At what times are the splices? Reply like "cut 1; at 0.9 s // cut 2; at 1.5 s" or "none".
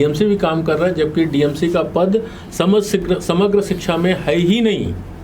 none